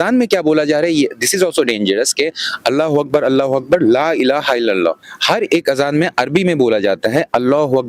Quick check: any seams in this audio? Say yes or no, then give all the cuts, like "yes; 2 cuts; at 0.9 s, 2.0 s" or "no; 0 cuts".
no; 0 cuts